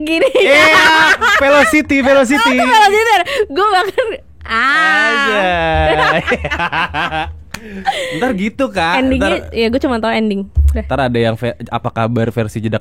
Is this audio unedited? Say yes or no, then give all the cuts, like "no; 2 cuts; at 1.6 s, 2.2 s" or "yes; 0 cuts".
yes; 0 cuts